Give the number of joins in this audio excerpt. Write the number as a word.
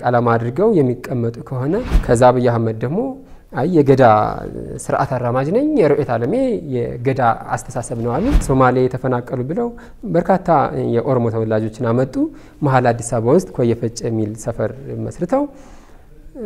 two